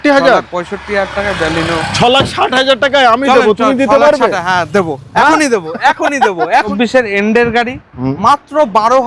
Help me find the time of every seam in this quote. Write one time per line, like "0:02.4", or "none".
0:06.7